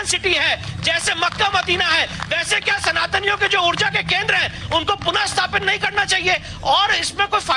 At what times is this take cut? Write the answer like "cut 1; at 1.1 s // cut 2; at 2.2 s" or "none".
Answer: none